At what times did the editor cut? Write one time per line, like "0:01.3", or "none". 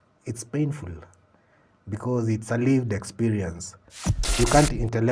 0:04.2